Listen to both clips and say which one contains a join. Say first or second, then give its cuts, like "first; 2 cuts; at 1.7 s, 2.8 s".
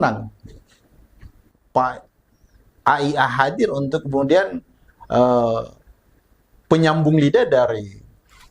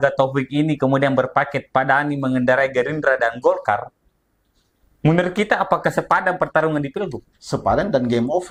first; 1 cut; at 1.5 s